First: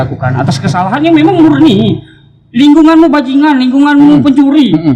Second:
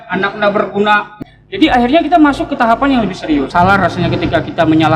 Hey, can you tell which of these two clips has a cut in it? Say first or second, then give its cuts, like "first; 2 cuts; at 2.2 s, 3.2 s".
second; 2 cuts; at 1.1 s, 3.5 s